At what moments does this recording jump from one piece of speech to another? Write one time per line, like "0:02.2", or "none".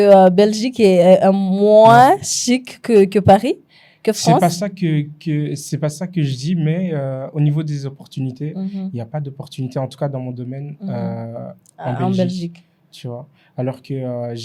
none

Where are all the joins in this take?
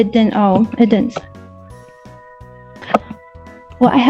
none

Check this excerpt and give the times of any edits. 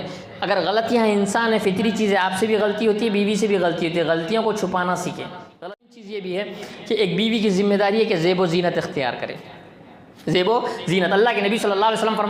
0:05.6

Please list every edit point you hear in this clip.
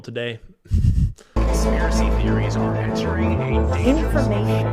0:01.2

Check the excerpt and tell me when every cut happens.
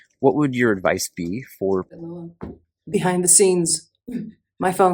0:02.0

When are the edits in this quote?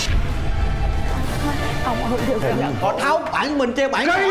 0:02.8

